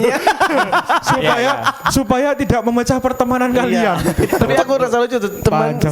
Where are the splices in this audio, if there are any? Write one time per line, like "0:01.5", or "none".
0:04.5